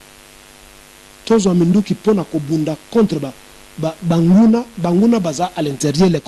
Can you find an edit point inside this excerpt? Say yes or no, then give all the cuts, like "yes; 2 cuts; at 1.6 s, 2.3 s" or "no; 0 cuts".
no; 0 cuts